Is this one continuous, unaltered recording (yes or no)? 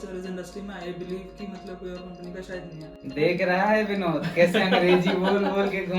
no